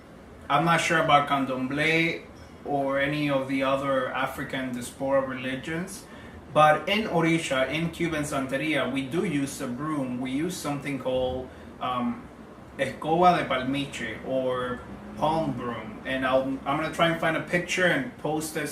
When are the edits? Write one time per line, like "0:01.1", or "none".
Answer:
0:03.5